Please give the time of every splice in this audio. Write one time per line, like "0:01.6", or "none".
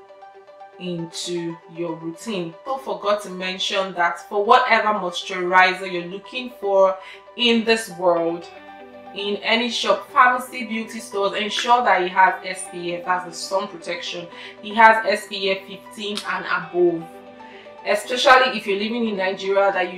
0:02.6